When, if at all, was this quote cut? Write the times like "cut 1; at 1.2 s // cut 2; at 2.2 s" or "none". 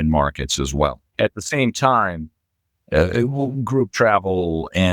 cut 1; at 1.0 s